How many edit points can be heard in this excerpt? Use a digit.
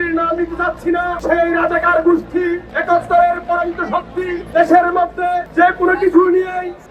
1